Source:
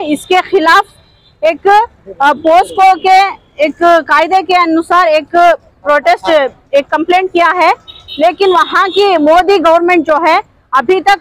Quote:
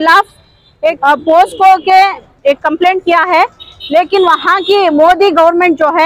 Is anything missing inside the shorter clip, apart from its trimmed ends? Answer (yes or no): yes